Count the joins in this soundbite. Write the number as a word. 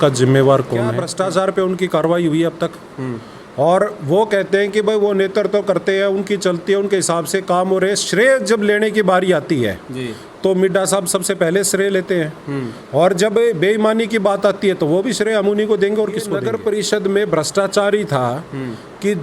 two